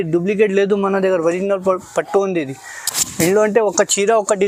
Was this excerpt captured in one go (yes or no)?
yes